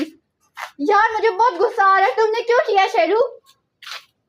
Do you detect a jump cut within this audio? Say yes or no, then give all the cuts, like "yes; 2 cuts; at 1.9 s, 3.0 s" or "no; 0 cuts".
no; 0 cuts